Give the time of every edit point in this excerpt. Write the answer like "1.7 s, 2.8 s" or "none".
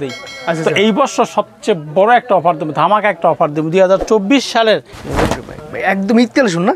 4.9 s